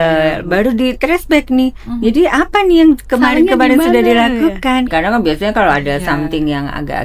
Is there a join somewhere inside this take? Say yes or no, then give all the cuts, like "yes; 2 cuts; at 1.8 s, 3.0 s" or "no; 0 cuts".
yes; 1 cut; at 4.9 s